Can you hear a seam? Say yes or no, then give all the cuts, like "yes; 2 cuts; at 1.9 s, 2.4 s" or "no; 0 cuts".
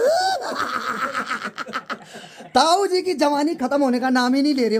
no; 0 cuts